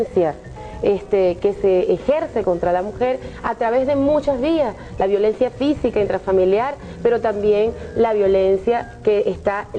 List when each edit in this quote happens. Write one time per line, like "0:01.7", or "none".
none